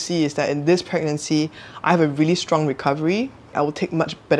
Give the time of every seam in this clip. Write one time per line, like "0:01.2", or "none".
none

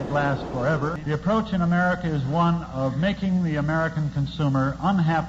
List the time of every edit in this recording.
0:01.0

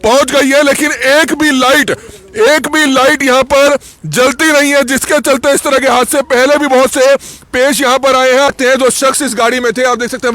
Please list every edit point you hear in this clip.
0:08.5

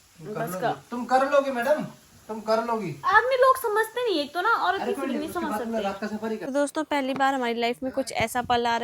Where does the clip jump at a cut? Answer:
0:06.4

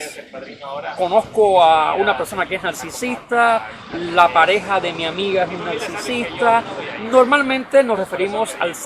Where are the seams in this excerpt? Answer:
none

